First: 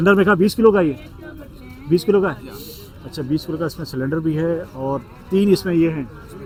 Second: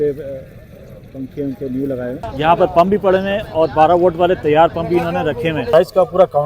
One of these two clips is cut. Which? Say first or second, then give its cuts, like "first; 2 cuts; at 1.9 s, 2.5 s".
second; 2 cuts; at 2.2 s, 5.6 s